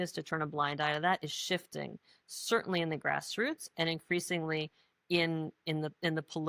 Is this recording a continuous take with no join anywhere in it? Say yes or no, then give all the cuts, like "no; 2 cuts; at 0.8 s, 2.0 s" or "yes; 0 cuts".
yes; 0 cuts